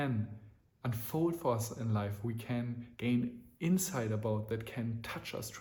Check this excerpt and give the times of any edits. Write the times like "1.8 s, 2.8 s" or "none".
none